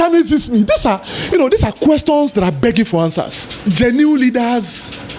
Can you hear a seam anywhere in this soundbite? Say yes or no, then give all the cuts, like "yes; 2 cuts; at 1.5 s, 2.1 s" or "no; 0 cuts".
yes; 1 cut; at 3.4 s